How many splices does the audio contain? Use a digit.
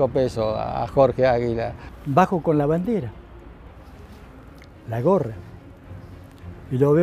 1